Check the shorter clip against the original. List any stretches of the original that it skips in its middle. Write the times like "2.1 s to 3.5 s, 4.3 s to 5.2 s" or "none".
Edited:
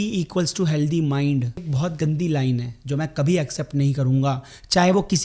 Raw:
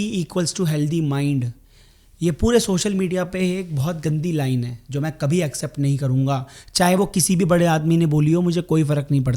1.7 s to 3.7 s